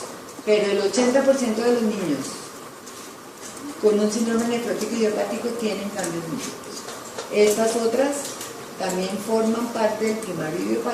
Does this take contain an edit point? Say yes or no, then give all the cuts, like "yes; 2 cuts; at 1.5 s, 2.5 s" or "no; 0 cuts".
yes; 1 cut; at 9.2 s